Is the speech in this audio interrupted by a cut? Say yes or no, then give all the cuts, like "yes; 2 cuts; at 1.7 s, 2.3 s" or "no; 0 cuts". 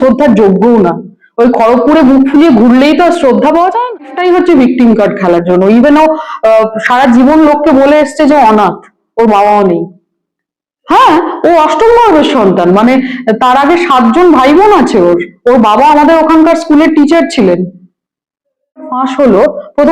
yes; 2 cuts; at 4.1 s, 18.9 s